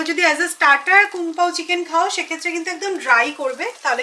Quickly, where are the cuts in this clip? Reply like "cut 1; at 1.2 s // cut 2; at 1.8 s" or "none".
none